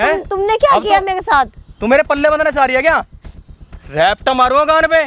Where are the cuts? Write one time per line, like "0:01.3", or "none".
none